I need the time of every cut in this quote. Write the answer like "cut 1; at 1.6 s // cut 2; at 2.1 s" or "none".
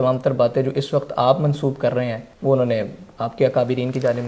cut 1; at 2.3 s

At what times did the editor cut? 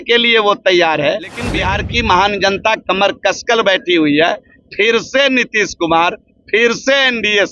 cut 1; at 1.4 s

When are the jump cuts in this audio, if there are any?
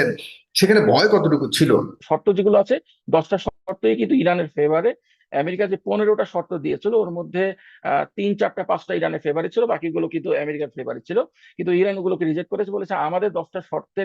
cut 1; at 2.0 s

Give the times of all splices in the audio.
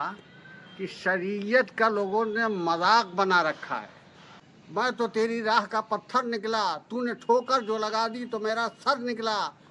cut 1; at 4.8 s

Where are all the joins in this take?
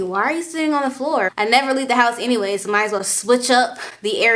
cut 1; at 1.3 s

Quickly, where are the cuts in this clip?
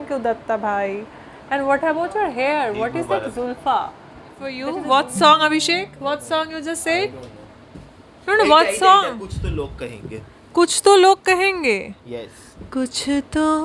cut 1; at 4.7 s

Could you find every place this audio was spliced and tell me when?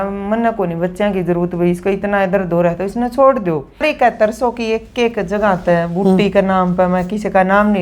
cut 1; at 4.2 s

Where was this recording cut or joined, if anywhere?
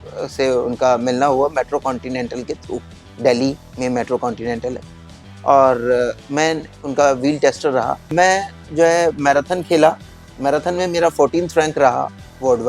cut 1; at 8.1 s

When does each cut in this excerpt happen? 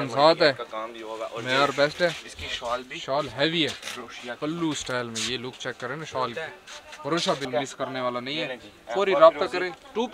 cut 1; at 7.4 s

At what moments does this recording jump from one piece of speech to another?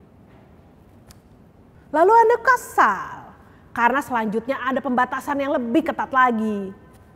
cut 1; at 1.8 s

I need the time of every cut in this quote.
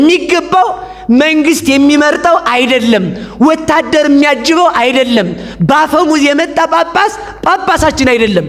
none

